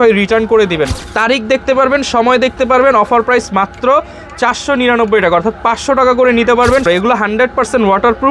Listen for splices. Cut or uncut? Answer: cut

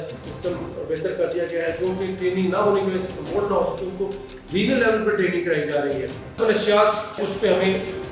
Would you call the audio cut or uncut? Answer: cut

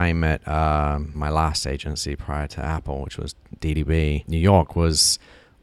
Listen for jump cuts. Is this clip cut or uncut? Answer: cut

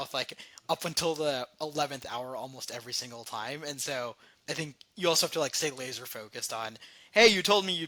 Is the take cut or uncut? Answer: uncut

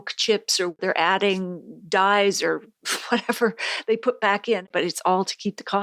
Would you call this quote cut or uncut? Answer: cut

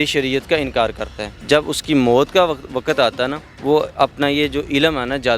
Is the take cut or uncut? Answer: cut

